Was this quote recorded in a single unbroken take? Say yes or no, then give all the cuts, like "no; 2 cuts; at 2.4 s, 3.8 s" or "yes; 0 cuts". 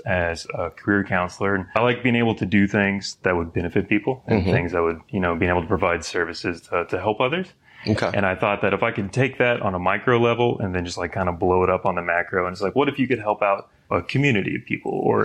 yes; 0 cuts